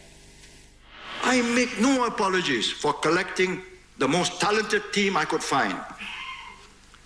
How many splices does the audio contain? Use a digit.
1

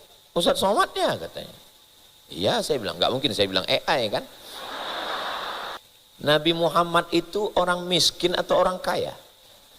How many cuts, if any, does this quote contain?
1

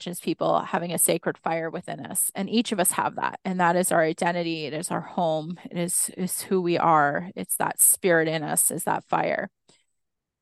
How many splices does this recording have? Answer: 1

